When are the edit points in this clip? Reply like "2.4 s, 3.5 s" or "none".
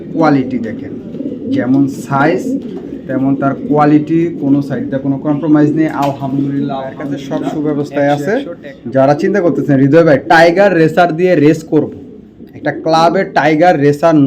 7.5 s